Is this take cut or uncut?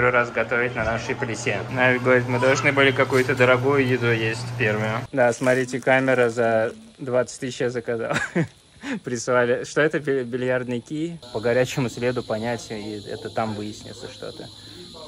cut